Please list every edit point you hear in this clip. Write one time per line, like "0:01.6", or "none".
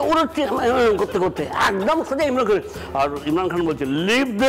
0:02.8